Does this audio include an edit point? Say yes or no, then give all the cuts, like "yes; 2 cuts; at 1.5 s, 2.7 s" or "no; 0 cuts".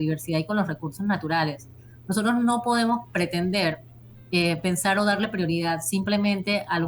no; 0 cuts